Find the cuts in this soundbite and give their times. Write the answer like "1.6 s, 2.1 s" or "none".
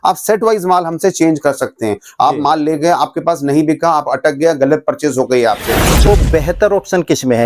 6.1 s

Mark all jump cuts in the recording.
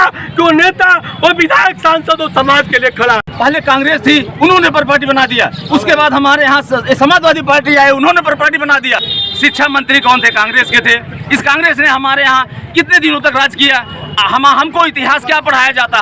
3.2 s, 9.1 s

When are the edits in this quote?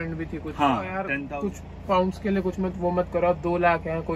1.1 s

